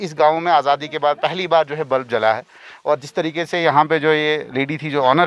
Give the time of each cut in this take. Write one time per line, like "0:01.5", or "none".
none